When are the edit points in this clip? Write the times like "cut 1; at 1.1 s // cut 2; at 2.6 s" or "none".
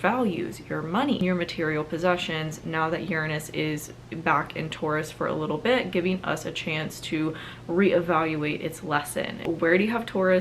cut 1; at 1.2 s // cut 2; at 9.4 s